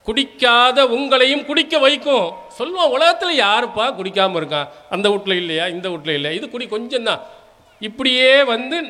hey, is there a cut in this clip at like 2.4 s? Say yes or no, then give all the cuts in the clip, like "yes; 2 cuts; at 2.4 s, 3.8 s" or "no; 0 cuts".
no; 0 cuts